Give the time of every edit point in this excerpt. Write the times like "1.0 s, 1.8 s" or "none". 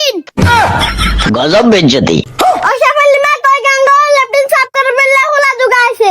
2.3 s